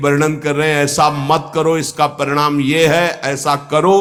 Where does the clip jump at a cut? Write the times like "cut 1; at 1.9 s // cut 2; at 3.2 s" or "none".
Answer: none